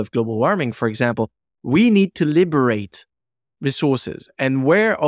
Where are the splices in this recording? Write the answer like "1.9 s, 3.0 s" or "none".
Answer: none